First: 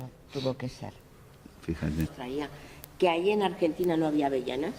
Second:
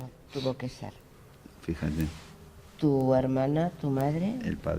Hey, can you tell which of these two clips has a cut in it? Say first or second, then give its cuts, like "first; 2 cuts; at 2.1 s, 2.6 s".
second; 1 cut; at 2.1 s